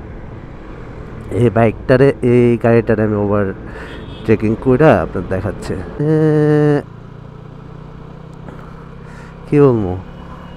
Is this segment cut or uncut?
cut